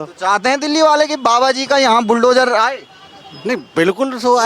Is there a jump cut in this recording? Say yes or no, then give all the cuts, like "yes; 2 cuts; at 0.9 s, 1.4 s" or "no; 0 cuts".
no; 0 cuts